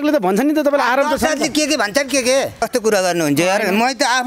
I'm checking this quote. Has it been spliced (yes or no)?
yes